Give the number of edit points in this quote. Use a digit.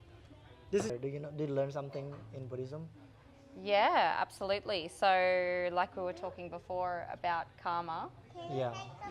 1